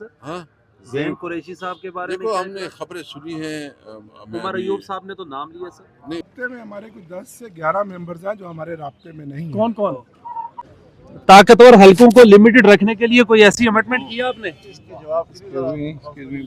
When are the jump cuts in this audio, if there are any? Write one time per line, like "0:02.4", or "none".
0:06.2
0:10.6